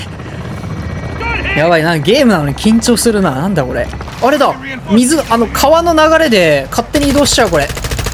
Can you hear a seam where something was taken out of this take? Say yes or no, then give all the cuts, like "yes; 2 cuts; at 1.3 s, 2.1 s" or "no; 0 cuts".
yes; 2 cuts; at 1.2 s, 4.1 s